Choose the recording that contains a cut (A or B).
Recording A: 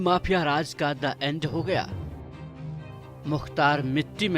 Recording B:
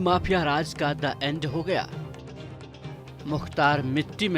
A